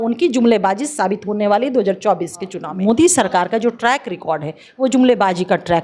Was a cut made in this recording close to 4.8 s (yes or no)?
no